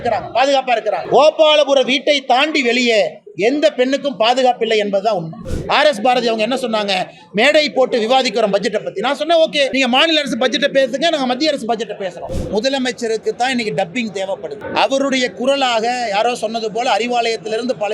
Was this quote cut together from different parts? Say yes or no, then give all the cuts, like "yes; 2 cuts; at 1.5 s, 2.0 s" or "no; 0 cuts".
yes; 5 cuts; at 1.0 s, 5.4 s, 9.7 s, 12.3 s, 14.6 s